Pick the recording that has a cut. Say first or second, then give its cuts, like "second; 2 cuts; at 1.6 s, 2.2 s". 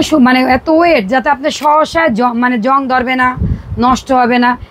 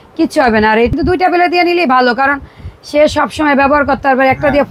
second; 1 cut; at 0.9 s